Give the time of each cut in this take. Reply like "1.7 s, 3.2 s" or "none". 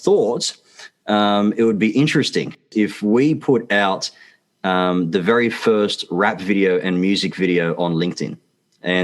2.6 s